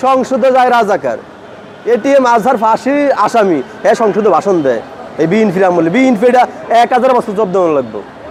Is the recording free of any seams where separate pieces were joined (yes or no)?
yes